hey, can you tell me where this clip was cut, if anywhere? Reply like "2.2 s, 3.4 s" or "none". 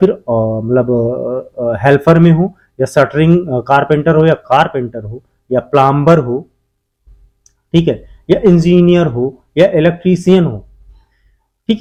none